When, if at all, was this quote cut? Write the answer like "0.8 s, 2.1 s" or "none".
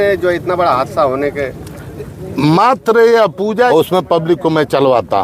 3.7 s